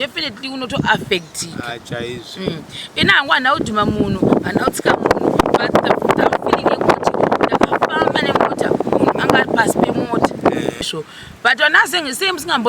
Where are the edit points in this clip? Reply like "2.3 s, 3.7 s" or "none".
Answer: 10.8 s